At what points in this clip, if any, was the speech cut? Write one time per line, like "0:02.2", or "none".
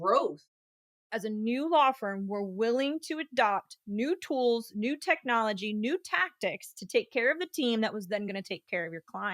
0:01.1